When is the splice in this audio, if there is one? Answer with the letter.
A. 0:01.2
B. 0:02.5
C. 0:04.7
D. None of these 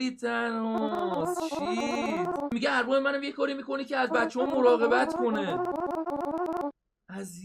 B